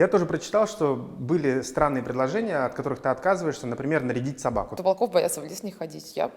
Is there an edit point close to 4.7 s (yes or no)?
yes